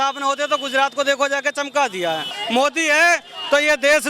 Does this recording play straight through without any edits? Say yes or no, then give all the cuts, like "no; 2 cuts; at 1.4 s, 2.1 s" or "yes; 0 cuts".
no; 1 cut; at 2.3 s